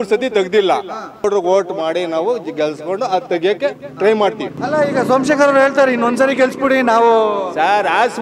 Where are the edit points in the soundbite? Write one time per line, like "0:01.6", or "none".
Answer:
0:01.2
0:04.5